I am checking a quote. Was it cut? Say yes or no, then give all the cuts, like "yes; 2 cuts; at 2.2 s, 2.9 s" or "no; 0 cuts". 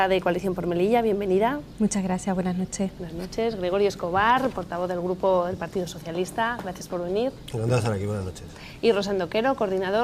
yes; 1 cut; at 2.9 s